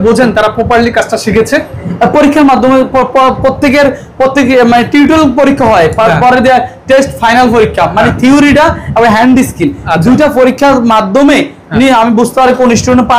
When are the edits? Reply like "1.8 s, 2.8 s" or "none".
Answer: none